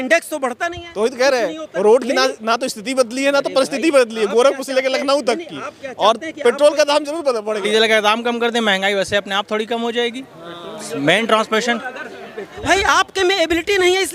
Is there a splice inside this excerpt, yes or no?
yes